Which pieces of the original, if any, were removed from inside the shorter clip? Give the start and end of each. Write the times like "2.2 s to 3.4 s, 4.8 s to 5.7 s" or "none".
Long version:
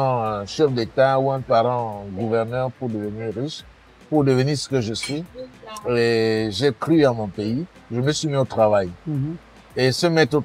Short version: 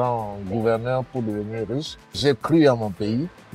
3.8 s to 6.5 s